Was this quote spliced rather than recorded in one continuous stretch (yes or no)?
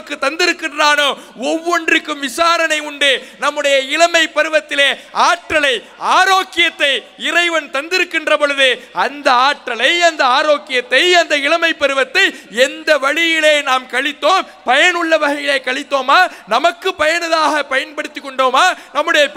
no